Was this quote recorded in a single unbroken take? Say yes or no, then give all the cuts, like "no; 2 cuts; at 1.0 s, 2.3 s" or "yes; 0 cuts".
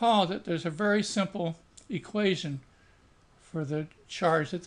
no; 1 cut; at 2.4 s